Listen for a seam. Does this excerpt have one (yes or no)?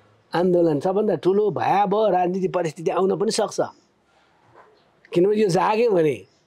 no